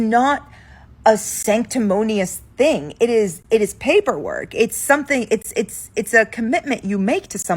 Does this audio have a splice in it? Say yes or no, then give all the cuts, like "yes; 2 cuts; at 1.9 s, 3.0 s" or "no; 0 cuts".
yes; 1 cut; at 2.9 s